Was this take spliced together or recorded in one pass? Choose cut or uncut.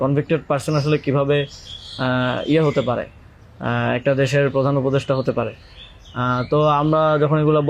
uncut